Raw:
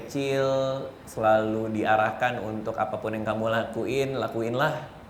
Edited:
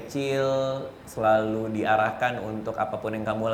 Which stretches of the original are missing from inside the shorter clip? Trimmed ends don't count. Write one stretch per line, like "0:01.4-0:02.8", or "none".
none